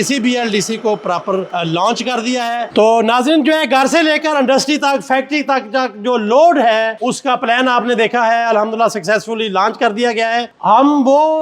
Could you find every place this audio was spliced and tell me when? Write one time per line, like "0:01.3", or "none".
0:01.5
0:02.7
0:06.9
0:10.5